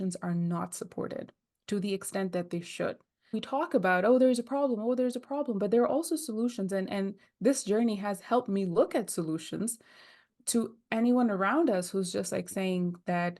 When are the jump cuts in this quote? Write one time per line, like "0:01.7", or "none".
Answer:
0:03.4
0:10.3